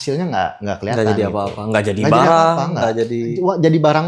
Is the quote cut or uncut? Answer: uncut